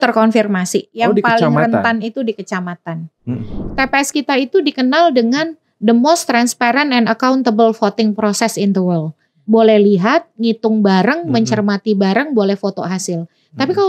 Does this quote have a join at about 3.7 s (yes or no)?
yes